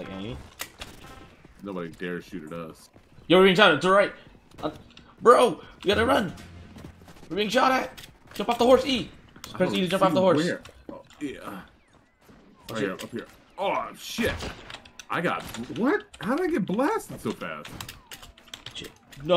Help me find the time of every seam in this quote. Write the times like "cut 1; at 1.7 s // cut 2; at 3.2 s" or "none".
cut 1; at 1.1 s